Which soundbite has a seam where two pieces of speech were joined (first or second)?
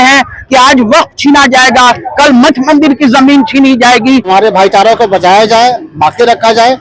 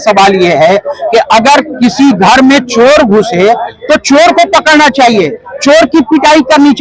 first